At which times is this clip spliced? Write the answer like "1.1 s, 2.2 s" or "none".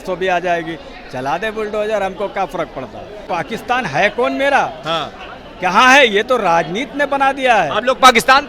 3.2 s